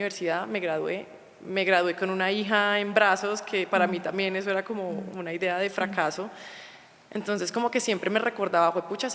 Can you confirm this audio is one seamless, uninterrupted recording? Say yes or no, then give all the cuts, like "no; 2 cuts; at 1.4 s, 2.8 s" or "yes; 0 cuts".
yes; 0 cuts